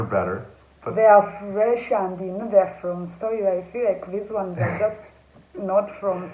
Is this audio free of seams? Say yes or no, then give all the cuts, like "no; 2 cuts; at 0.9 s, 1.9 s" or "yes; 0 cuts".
yes; 0 cuts